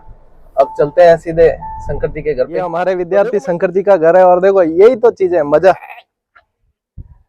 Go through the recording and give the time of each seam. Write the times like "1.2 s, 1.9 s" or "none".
2.6 s